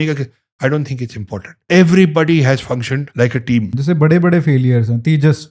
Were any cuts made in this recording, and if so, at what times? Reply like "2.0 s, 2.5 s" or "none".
1.5 s, 3.0 s, 3.7 s